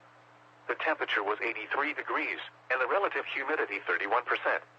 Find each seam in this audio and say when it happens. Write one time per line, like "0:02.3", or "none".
0:01.2